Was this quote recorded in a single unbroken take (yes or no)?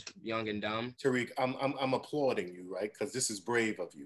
no